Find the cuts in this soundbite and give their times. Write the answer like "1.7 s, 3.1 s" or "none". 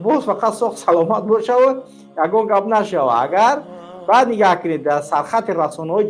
none